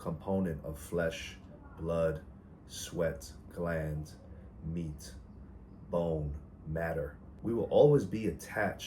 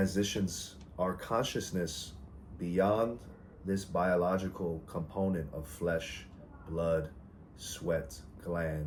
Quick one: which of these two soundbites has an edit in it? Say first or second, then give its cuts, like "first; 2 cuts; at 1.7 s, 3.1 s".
first; 1 cut; at 7.2 s